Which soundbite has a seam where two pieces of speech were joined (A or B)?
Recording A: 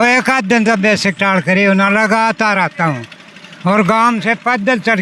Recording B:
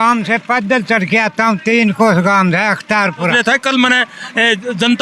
B